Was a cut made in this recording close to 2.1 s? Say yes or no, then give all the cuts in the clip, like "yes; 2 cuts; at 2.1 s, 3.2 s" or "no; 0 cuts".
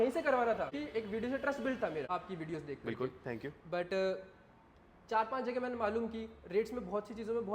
yes; 2 cuts; at 0.8 s, 2.1 s